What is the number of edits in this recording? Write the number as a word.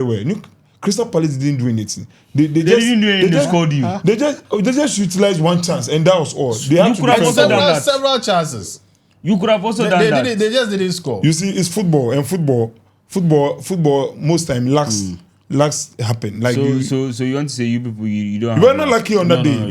zero